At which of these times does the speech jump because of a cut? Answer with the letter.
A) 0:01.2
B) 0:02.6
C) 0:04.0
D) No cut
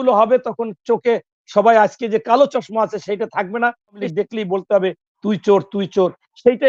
C